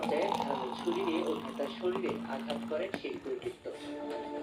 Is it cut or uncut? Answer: uncut